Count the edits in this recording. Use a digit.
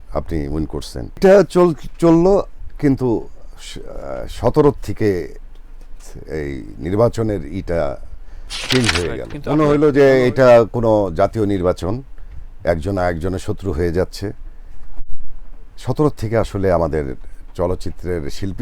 2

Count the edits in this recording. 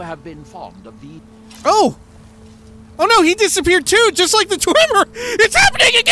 2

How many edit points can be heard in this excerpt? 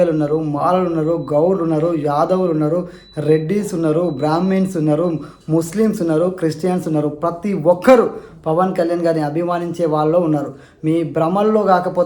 0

